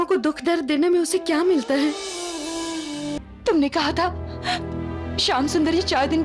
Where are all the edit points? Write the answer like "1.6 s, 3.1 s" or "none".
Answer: 3.2 s

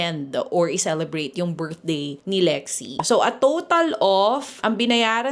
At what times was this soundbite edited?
2.2 s, 2.9 s

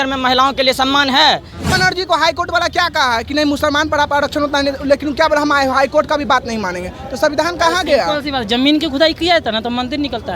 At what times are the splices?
1.7 s

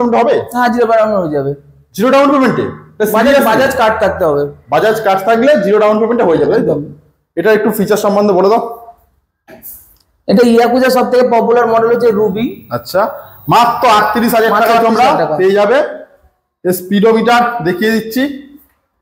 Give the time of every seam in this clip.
none

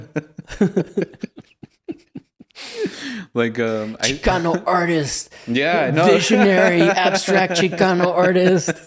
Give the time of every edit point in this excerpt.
none

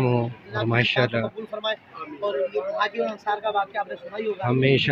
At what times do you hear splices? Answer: none

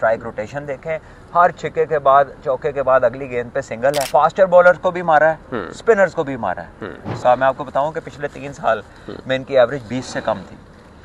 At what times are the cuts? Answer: 4.1 s, 7.2 s

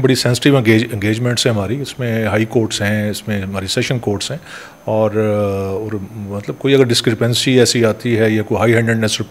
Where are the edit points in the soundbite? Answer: none

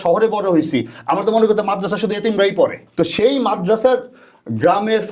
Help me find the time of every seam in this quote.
2.8 s

